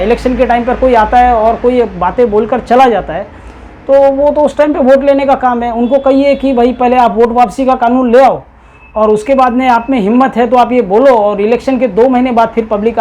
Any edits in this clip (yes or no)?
no